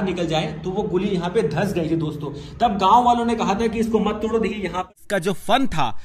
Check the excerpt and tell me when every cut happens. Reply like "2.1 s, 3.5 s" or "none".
4.9 s